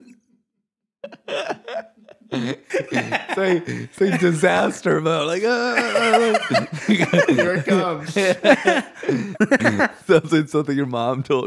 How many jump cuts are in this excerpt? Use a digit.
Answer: 1